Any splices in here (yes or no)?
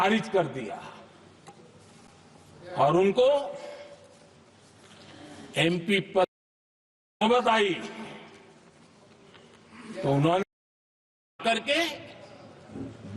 no